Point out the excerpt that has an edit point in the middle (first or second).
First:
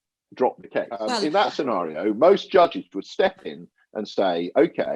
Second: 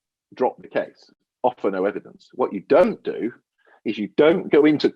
first